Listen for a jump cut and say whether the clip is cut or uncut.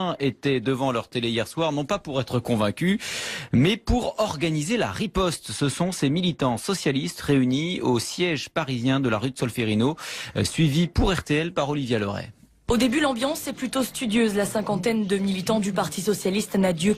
cut